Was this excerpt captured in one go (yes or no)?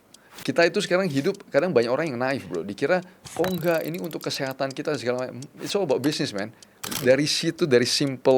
yes